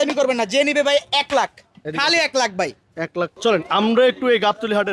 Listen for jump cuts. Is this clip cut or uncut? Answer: cut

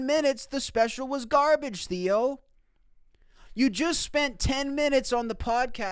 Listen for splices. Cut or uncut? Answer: uncut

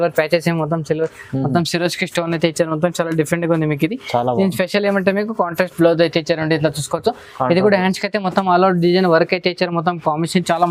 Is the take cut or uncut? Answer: uncut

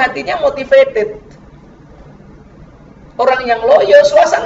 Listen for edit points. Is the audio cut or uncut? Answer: uncut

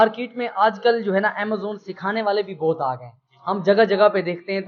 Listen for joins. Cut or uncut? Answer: uncut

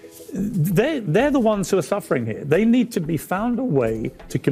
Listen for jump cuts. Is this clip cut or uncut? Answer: uncut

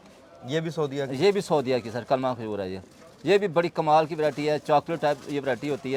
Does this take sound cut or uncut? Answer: uncut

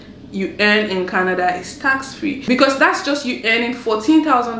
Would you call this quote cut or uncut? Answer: cut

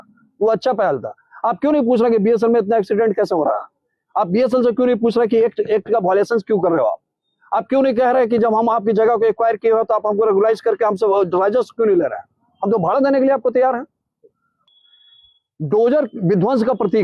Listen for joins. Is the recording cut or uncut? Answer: cut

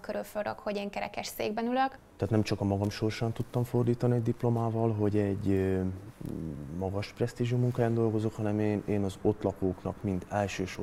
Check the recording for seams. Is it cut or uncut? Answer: cut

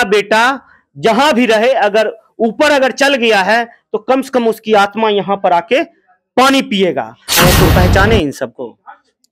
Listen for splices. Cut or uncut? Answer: cut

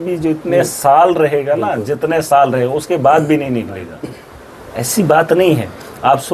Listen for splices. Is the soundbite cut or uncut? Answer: uncut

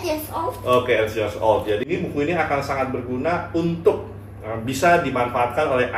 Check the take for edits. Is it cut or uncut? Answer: cut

